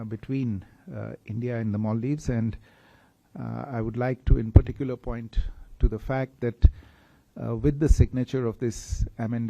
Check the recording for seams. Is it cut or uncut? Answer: uncut